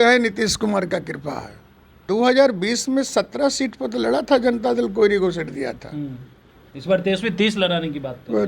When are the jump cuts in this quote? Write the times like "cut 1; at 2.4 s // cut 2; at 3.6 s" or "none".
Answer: cut 1; at 2.0 s